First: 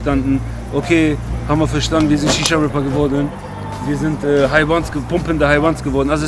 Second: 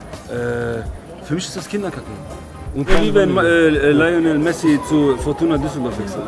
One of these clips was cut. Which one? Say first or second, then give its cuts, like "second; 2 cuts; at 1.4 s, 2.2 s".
second; 1 cut; at 2.9 s